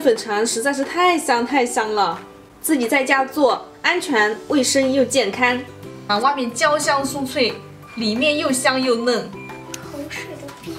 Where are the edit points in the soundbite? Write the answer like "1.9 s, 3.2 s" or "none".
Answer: 6.0 s